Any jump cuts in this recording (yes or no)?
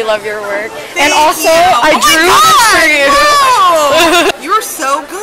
yes